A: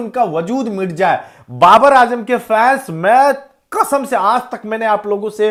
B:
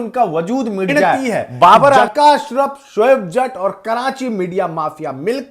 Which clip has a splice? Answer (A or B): B